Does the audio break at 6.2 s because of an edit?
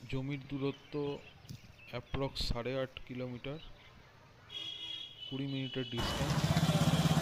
yes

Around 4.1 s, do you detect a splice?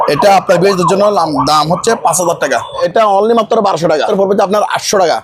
yes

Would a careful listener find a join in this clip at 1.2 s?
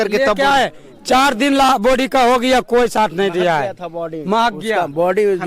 no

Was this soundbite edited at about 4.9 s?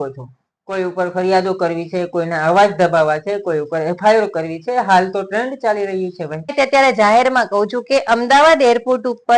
no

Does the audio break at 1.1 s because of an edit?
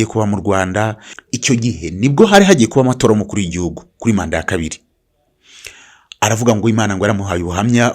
yes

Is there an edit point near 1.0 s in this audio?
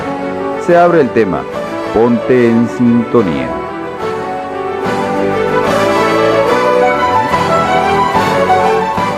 no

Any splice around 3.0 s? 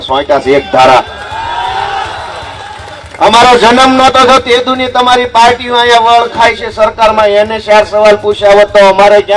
no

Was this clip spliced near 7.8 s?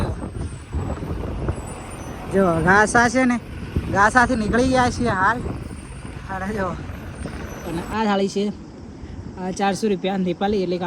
yes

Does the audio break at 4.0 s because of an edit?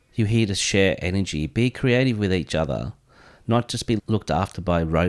yes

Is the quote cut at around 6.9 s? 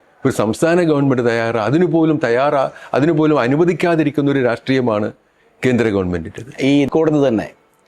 yes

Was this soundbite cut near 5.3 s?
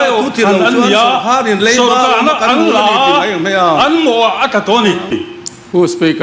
yes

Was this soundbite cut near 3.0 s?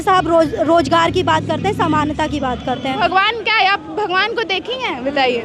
yes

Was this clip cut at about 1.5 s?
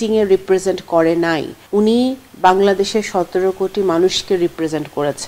yes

